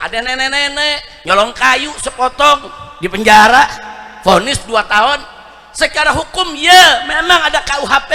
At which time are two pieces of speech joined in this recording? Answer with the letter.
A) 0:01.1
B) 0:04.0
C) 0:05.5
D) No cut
A